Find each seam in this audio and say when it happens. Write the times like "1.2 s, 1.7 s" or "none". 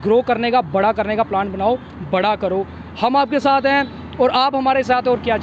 none